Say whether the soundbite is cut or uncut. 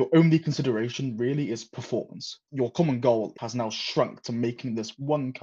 cut